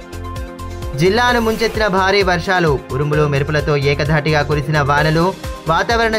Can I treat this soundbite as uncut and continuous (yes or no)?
yes